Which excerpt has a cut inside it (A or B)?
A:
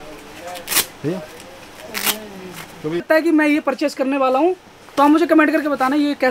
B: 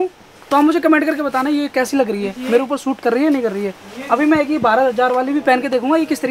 A